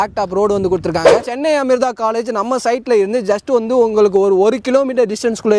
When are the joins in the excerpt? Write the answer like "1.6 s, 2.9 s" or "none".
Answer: 1.2 s